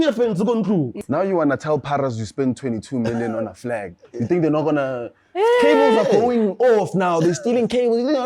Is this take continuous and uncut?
no; 1 cut; at 0.9 s

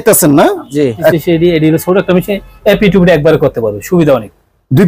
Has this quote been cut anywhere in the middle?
yes; 1 cut; at 1.1 s

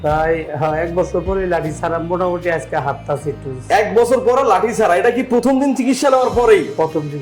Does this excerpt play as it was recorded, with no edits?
yes; 0 cuts

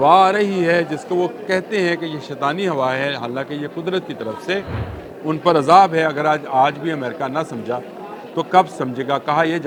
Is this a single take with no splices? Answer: yes; 0 cuts

